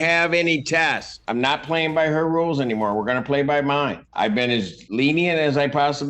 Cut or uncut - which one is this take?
cut